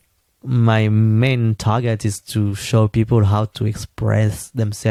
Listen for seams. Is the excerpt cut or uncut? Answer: uncut